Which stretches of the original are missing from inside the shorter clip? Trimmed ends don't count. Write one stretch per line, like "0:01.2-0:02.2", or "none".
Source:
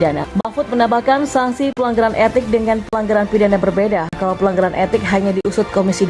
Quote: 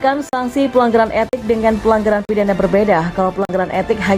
none